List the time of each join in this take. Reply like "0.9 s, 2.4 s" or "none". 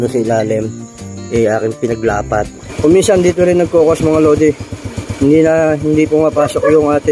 2.6 s